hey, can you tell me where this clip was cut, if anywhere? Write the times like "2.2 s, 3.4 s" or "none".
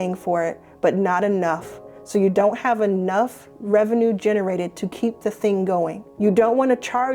6.0 s